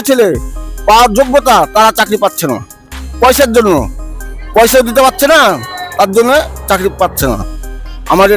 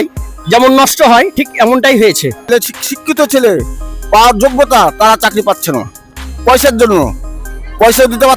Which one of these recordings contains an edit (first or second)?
second